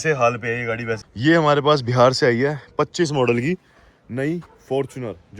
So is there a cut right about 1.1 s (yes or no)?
yes